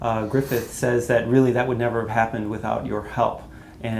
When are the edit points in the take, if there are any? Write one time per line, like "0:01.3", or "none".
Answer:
none

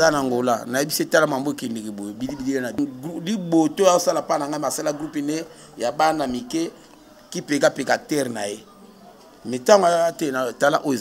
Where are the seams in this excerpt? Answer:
0:02.8

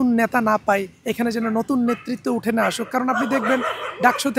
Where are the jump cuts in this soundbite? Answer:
none

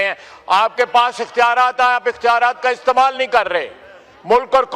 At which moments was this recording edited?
none

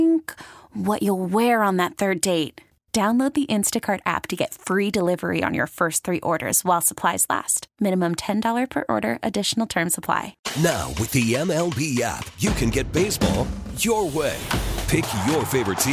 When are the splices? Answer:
0:10.4

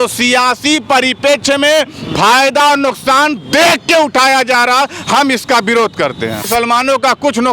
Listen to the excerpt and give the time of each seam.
0:06.5

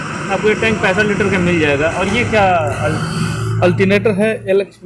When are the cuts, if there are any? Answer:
none

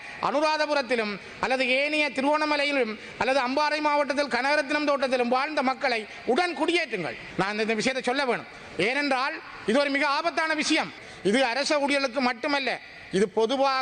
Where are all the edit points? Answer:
0:07.2
0:11.0

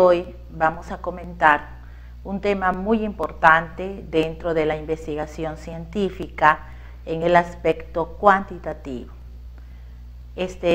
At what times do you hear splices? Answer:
0:06.2

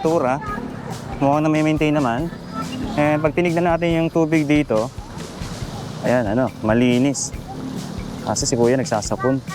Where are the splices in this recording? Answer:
none

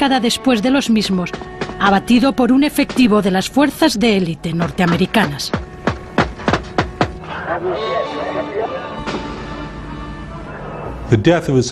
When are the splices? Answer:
0:01.6

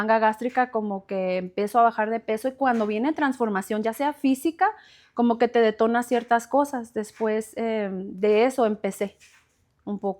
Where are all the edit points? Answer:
none

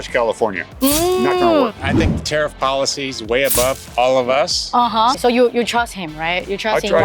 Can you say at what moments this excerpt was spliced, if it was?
0:01.8
0:03.2
0:05.2

